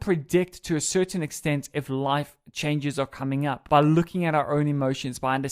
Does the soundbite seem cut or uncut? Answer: cut